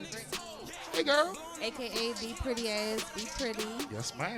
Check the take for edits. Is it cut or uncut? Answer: uncut